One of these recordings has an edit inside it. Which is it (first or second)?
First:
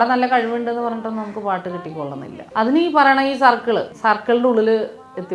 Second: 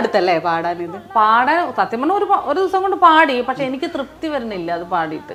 first